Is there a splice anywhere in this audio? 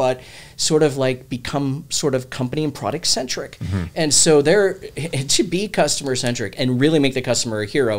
no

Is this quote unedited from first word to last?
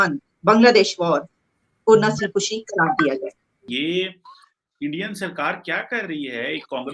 no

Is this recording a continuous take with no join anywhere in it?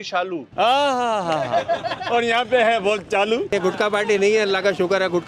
no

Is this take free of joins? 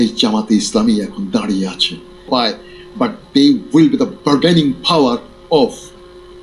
no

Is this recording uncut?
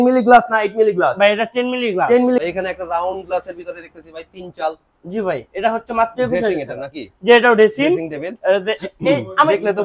no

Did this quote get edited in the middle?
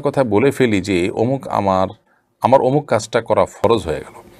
no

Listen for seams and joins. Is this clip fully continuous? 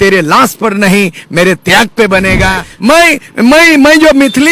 no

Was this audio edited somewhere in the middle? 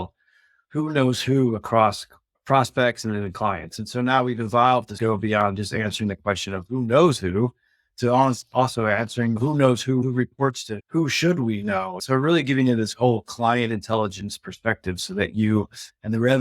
yes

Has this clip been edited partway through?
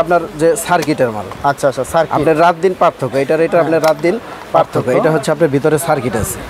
no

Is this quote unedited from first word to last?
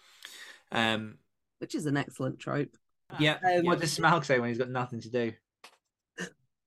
no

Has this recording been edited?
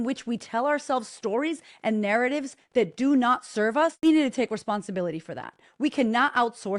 yes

